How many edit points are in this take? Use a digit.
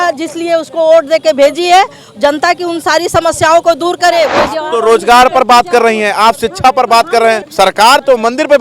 2